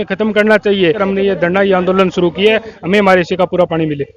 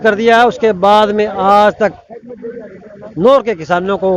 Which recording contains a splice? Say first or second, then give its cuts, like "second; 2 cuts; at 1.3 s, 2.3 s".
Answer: first; 1 cut; at 1.0 s